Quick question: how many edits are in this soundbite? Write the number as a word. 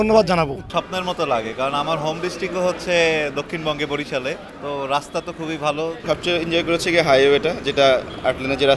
two